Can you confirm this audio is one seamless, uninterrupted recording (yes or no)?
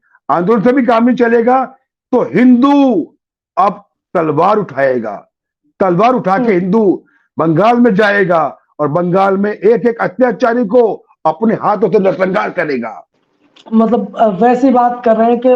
yes